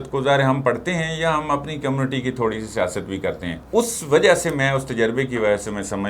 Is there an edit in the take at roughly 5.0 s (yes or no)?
no